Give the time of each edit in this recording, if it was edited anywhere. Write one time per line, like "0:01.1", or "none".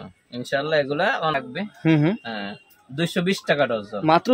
0:01.3